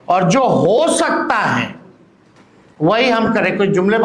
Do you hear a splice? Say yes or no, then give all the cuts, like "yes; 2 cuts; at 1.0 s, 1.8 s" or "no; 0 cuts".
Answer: no; 0 cuts